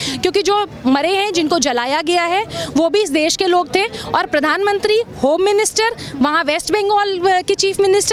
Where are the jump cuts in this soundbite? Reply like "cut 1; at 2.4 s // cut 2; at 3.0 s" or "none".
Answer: none